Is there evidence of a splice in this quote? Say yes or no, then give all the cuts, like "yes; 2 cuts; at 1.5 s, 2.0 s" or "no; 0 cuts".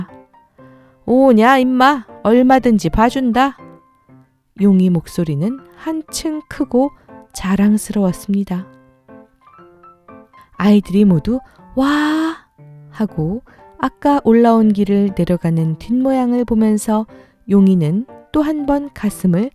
yes; 2 cuts; at 8.7 s, 10.5 s